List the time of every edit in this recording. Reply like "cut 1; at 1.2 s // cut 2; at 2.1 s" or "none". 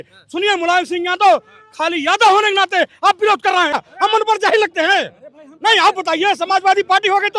cut 1; at 3.7 s